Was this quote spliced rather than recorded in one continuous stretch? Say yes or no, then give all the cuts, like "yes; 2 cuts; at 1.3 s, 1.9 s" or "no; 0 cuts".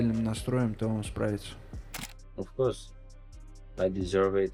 yes; 1 cut; at 2.0 s